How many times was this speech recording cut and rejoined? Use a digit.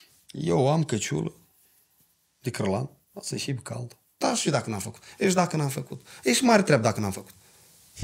1